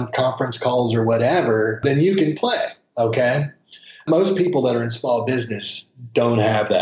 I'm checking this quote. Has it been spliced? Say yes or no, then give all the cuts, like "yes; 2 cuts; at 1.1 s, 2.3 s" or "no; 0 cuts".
no; 0 cuts